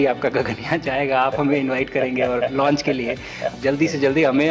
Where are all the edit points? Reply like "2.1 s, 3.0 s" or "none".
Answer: 3.5 s